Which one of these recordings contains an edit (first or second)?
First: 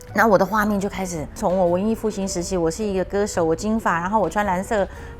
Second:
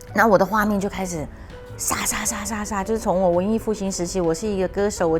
first